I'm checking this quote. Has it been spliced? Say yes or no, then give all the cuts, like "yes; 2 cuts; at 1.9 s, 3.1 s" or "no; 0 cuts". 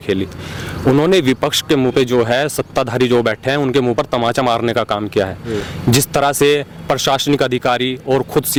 no; 0 cuts